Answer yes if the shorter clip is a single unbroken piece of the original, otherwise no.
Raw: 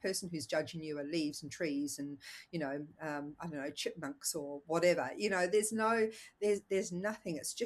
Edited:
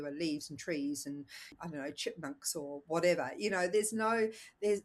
no